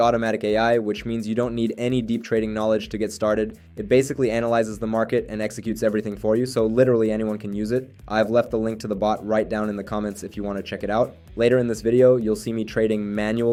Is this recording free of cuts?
yes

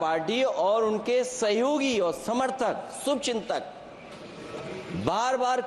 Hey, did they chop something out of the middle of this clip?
no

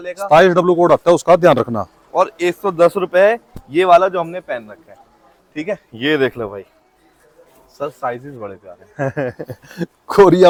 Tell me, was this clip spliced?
no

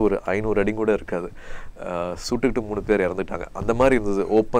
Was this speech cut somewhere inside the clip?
no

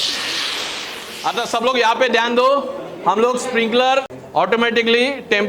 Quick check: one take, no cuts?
no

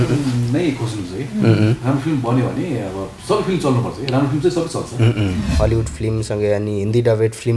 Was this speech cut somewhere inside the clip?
yes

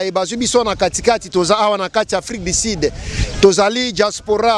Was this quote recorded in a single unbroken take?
yes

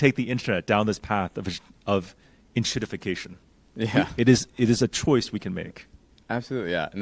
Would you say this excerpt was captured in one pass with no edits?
yes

